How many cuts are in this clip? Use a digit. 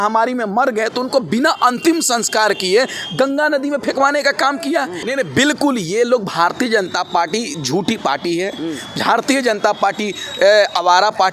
1